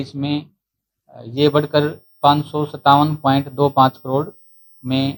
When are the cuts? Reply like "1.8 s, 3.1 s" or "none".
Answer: none